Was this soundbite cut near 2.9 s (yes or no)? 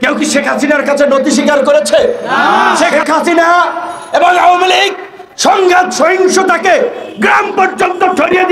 yes